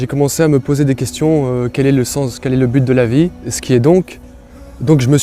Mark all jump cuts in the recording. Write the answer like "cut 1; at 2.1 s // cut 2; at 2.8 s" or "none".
cut 1; at 3.5 s